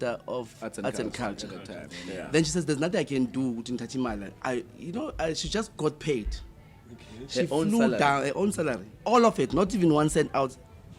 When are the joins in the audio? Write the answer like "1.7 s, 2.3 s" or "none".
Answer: none